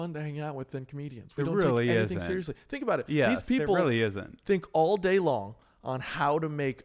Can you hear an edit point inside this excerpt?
no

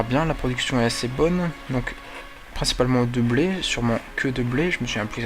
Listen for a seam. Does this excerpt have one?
yes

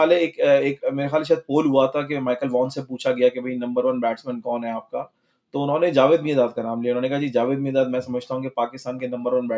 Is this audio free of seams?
yes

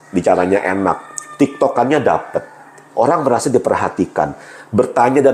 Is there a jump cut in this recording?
no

